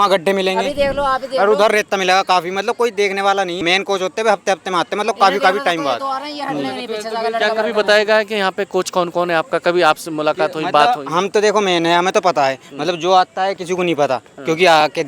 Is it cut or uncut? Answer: cut